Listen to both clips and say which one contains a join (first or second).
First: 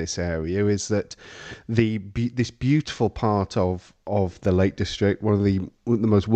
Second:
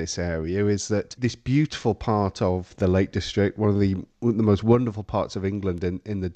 second